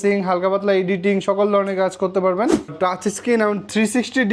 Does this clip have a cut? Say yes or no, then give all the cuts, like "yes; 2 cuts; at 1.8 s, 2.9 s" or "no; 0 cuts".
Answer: yes; 1 cut; at 2.9 s